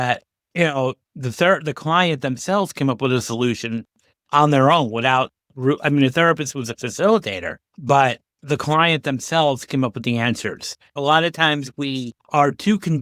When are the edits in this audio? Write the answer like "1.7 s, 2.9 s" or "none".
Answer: 10.9 s